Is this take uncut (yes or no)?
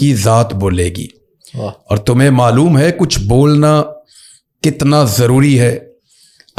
yes